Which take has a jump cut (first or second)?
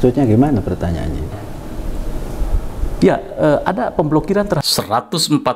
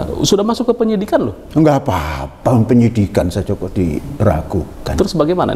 first